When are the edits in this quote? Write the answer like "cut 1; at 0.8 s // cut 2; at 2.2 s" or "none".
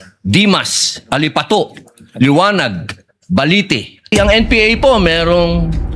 cut 1; at 4.1 s